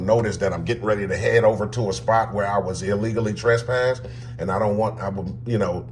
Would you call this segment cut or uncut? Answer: uncut